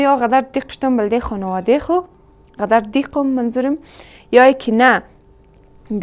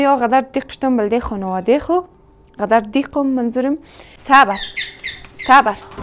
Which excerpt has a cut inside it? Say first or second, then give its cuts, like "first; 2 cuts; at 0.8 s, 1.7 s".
second; 1 cut; at 4.1 s